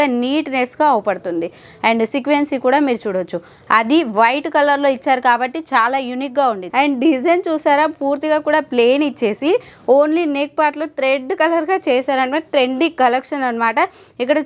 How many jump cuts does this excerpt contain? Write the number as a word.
one